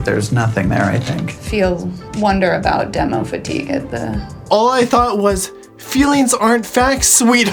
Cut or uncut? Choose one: uncut